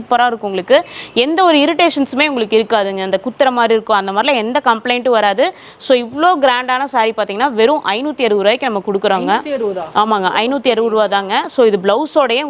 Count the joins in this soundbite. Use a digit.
0